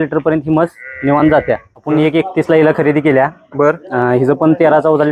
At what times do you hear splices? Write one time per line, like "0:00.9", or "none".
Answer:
0:01.7